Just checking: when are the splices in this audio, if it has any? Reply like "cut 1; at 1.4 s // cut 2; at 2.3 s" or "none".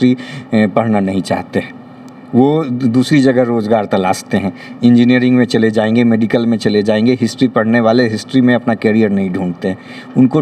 none